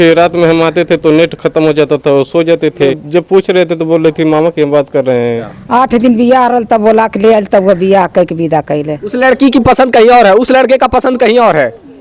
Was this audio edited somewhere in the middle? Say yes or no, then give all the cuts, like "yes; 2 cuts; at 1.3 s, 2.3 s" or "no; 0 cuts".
yes; 3 cuts; at 2.9 s, 5.5 s, 9.0 s